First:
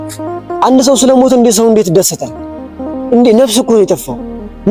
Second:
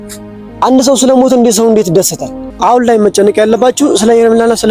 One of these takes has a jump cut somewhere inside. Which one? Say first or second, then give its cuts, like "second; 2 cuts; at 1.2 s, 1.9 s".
second; 1 cut; at 2.5 s